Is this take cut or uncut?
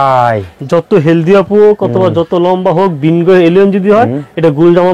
uncut